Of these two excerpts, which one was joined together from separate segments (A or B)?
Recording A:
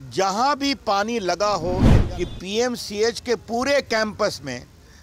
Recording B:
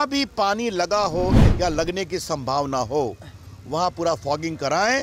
A